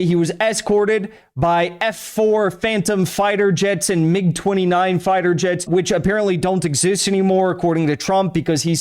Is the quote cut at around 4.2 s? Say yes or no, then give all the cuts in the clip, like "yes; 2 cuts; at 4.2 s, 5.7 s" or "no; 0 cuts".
no; 1 cut; at 5.7 s